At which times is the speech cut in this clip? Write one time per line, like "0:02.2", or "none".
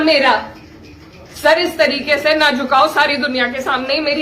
none